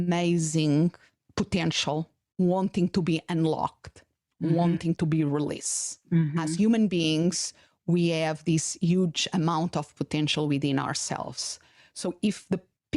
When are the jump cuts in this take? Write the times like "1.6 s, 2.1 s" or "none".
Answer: none